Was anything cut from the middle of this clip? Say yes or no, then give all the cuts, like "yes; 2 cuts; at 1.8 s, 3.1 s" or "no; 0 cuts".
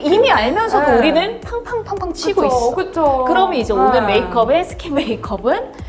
no; 0 cuts